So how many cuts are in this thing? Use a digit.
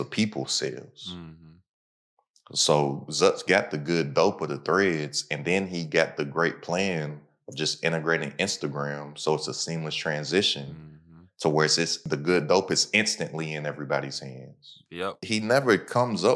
1